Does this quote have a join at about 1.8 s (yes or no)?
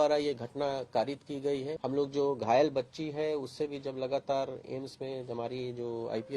yes